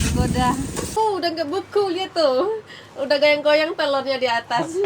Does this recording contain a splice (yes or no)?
yes